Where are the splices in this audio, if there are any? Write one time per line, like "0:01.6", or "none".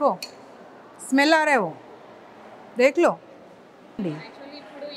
0:04.0